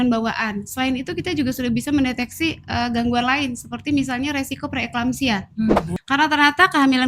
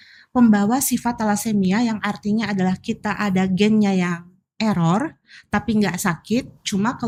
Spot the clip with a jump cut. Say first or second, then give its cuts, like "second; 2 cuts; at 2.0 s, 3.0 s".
first; 1 cut; at 5.9 s